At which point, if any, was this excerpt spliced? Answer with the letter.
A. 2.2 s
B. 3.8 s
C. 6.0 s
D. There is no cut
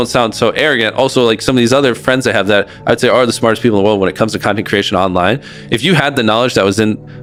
D